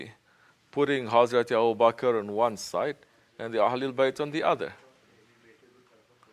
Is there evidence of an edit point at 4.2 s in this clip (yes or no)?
no